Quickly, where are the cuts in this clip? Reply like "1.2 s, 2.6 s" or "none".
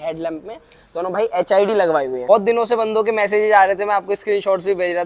2.2 s